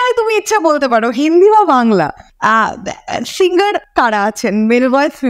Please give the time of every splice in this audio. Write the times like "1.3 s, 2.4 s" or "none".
2.2 s, 3.8 s